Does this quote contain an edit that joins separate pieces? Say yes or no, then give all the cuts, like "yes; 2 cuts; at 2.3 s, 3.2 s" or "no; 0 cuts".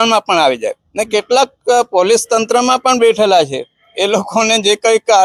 no; 0 cuts